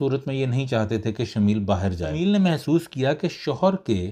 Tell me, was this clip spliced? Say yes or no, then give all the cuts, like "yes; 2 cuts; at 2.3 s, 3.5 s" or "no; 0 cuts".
yes; 1 cut; at 2.1 s